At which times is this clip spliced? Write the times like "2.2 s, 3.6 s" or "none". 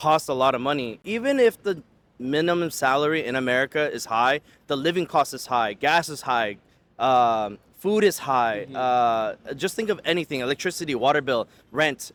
none

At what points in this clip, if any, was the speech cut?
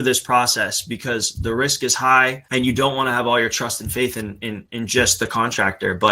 2.4 s

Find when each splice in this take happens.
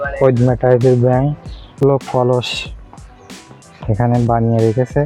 1.8 s

